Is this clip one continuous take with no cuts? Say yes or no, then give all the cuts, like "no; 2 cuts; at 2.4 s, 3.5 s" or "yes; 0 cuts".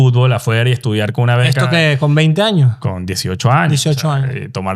yes; 0 cuts